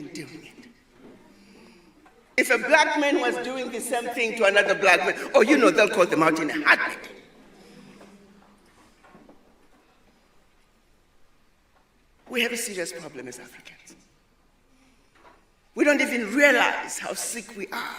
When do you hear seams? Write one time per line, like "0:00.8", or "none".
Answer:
none